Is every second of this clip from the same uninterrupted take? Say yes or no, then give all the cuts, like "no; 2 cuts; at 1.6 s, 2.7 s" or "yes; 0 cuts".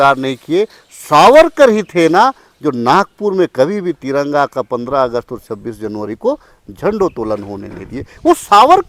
yes; 0 cuts